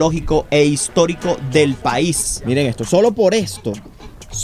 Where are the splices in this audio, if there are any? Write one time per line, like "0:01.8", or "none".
0:02.3